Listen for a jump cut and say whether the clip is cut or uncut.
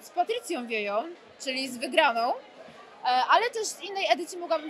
uncut